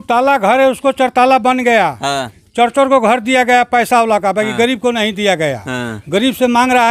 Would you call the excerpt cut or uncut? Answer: uncut